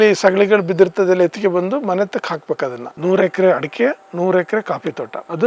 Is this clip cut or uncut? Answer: cut